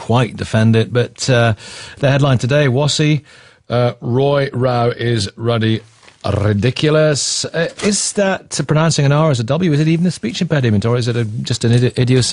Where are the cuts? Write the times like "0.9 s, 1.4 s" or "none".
6.7 s